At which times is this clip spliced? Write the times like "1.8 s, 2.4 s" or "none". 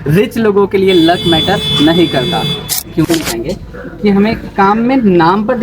3.1 s